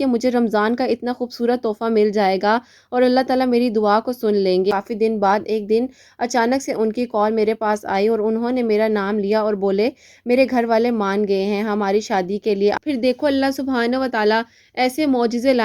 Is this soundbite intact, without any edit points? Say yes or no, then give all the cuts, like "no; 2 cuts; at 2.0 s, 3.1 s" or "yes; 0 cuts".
no; 2 cuts; at 4.7 s, 12.8 s